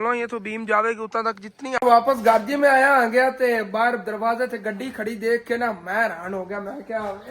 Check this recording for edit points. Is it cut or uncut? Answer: cut